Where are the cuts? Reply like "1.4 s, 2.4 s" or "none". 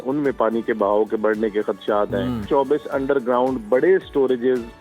2.5 s